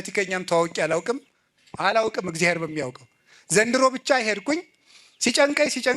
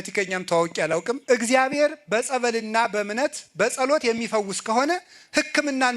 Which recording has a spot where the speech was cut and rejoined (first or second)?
second